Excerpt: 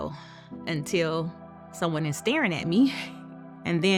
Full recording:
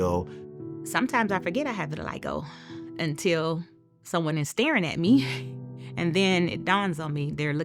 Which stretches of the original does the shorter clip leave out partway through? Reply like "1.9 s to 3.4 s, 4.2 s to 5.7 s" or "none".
none